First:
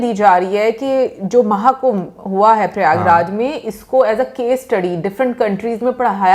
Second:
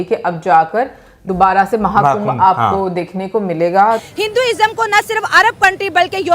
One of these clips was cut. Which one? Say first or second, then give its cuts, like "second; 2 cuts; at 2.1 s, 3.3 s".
second; 1 cut; at 4.0 s